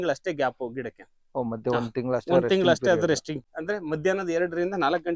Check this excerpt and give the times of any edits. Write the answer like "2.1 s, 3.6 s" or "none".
3.4 s